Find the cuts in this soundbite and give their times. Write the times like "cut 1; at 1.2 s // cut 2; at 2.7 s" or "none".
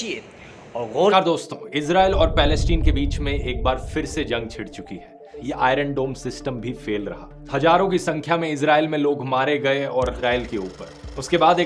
cut 1; at 1.1 s // cut 2; at 5.3 s // cut 3; at 10.2 s